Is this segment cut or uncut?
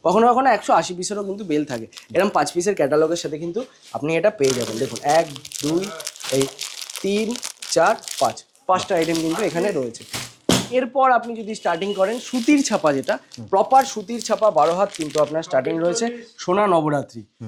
uncut